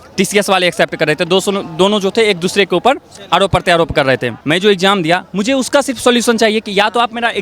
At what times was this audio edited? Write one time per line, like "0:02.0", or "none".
0:04.3